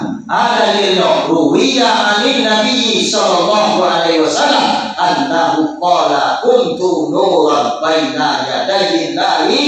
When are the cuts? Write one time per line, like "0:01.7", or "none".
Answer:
0:01.2

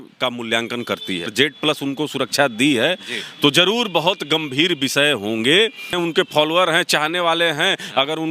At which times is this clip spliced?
0:01.3
0:05.9

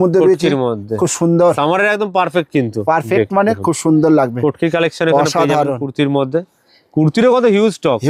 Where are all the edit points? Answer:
none

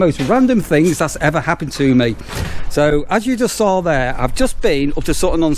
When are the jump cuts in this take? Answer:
none

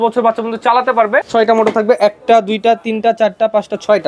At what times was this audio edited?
0:01.2

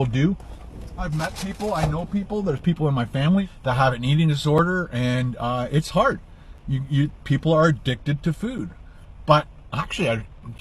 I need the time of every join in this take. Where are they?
0:04.9

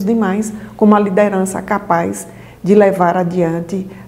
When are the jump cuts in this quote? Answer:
none

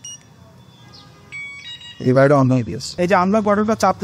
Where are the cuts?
0:02.8

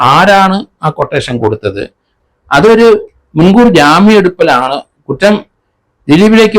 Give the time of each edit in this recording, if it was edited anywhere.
0:02.2

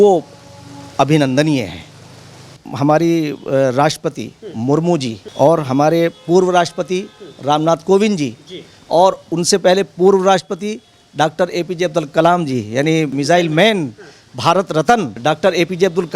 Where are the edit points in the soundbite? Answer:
0:02.6
0:05.2
0:15.2

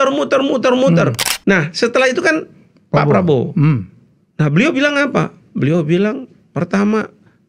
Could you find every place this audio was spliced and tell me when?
0:01.3

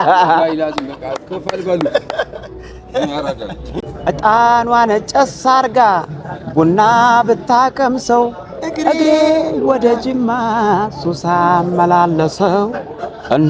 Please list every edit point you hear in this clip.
0:03.8

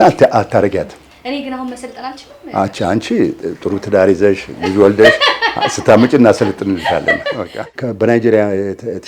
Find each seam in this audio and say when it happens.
0:07.6

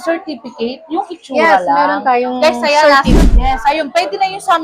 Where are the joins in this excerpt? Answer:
0:03.1

